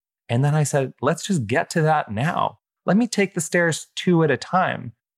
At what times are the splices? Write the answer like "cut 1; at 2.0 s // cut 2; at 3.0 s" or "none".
cut 1; at 0.9 s